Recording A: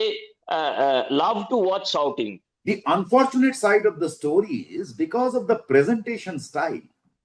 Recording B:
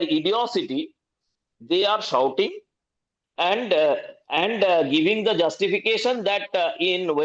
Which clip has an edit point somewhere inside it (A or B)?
A